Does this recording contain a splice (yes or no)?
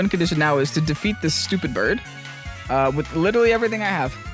no